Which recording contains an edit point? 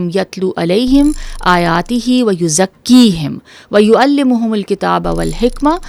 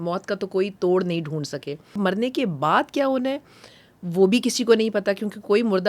second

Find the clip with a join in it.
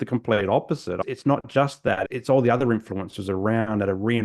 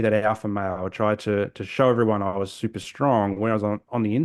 first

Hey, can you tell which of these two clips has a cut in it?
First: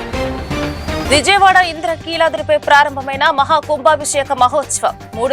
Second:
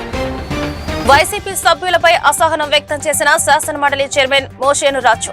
first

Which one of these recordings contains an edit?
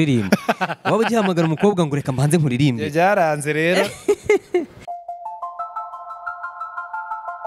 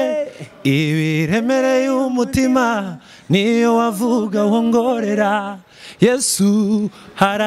first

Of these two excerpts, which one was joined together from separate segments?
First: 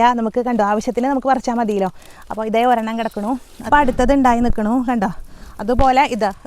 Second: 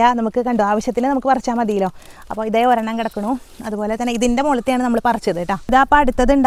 first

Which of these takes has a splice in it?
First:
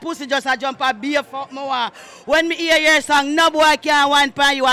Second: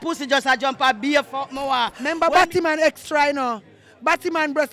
second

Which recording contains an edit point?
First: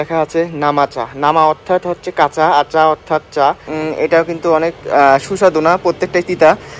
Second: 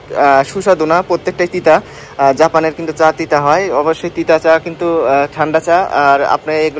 first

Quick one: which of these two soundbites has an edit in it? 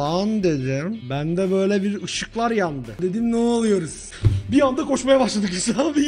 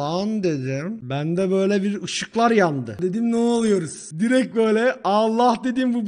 first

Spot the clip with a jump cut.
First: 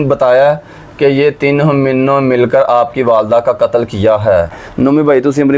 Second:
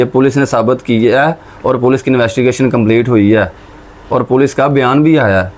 first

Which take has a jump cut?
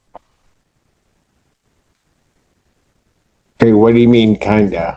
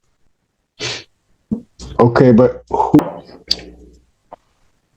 second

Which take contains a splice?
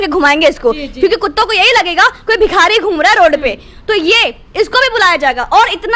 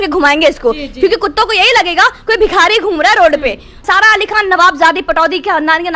second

